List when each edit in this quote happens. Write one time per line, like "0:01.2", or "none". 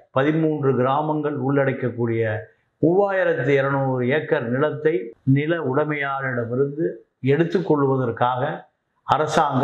0:05.1